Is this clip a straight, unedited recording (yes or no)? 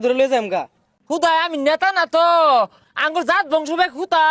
no